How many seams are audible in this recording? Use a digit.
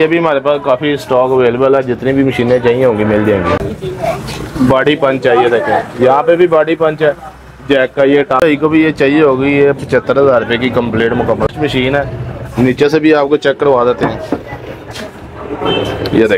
3